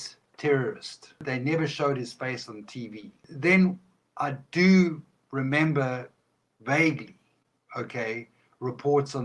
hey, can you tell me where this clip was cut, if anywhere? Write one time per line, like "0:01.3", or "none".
0:01.2
0:03.3